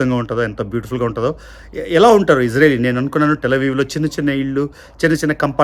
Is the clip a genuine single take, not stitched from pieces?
yes; 0 cuts

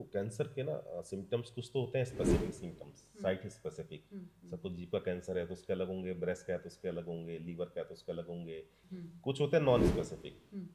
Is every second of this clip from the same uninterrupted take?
no; 1 cut; at 8.8 s

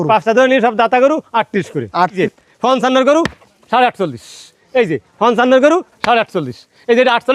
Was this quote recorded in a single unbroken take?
no; 1 cut; at 2.2 s

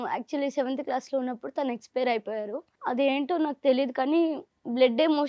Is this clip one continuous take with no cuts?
no; 1 cut; at 2.7 s

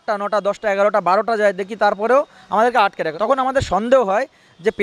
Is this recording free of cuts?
yes; 0 cuts

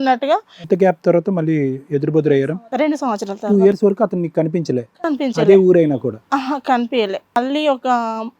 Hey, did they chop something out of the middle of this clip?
yes; 2 cuts; at 2.6 s, 7.4 s

